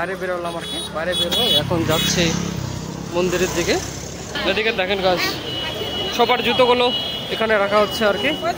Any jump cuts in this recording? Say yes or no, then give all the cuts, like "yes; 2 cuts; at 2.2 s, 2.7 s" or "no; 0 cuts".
yes; 1 cut; at 4.3 s